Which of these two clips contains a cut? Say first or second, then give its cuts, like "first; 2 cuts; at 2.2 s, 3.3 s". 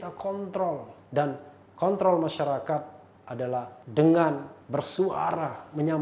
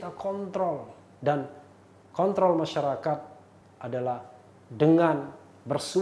first; 3 cuts; at 1.1 s, 3.4 s, 4.5 s